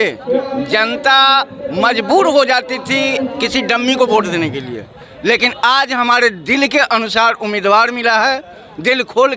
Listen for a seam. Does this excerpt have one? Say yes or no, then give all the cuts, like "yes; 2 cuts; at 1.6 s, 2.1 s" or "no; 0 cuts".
no; 0 cuts